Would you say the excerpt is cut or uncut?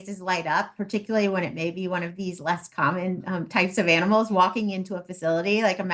uncut